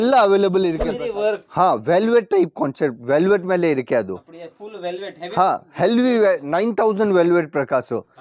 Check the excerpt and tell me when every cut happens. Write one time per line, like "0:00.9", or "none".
0:00.9